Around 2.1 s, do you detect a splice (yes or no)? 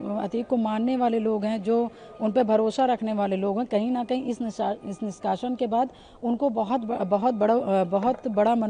no